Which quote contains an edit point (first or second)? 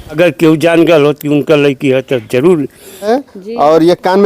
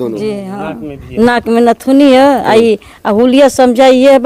first